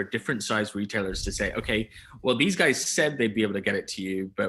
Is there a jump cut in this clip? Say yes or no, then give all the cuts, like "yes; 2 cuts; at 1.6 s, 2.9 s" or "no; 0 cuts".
no; 0 cuts